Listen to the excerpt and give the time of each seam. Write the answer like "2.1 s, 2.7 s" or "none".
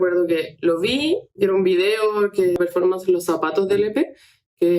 2.6 s